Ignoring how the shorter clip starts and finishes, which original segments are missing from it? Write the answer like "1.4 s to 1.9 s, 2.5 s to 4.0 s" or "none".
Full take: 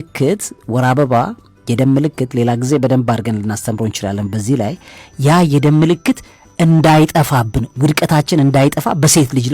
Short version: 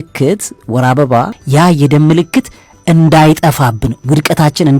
1.4 s to 5.1 s